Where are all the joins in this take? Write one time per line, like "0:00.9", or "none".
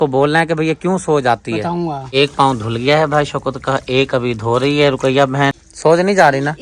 0:02.0
0:05.7